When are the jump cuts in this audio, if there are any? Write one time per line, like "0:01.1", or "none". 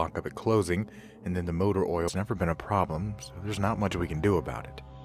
none